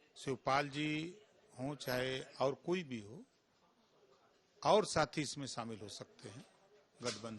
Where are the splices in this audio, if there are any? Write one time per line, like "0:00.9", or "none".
none